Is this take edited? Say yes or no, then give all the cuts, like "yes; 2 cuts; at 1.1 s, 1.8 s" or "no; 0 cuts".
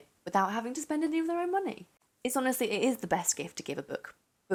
no; 0 cuts